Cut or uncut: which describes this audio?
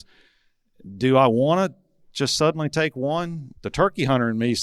cut